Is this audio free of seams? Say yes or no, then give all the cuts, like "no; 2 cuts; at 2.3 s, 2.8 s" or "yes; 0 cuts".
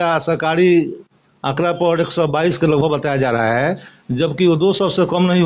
yes; 0 cuts